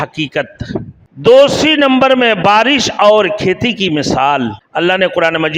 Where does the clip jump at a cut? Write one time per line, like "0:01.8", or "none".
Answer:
0:01.0
0:04.6